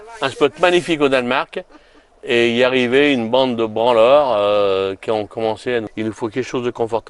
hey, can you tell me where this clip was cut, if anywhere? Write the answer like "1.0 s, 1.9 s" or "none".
5.9 s